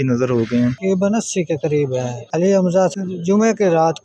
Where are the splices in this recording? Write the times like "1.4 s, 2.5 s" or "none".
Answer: 0.8 s, 2.2 s, 2.9 s